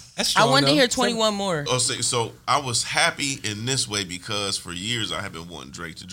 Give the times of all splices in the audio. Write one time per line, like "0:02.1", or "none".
0:01.7